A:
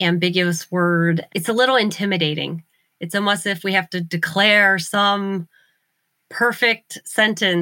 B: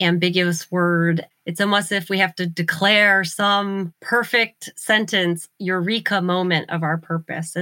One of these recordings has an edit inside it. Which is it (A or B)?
B